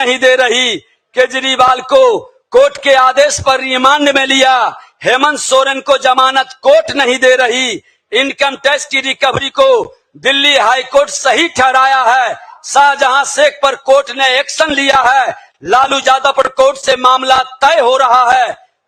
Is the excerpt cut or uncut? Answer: uncut